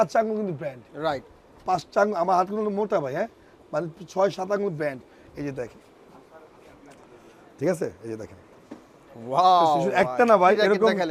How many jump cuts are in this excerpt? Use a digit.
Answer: 0